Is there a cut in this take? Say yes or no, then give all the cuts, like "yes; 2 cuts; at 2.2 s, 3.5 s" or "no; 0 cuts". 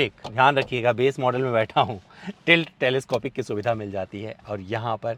no; 0 cuts